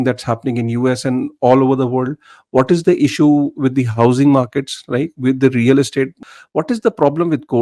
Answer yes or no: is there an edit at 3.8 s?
no